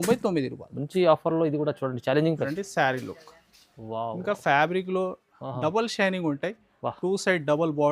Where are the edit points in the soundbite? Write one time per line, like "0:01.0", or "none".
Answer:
0:02.5